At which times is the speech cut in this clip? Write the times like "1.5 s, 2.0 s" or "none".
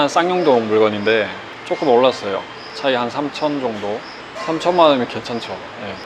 2.6 s